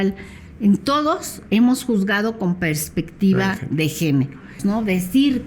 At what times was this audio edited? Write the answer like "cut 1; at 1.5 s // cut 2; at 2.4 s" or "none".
cut 1; at 4.5 s